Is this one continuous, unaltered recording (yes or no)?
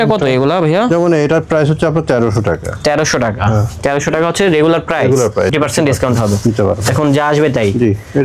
no